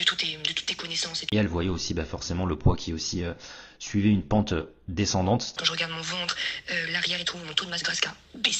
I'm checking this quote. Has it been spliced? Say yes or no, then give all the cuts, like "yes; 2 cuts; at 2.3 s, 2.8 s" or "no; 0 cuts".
yes; 2 cuts; at 1.2 s, 5.5 s